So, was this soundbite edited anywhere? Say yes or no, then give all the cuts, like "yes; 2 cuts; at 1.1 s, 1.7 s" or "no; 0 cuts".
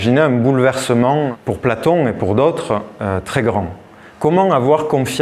yes; 1 cut; at 1.3 s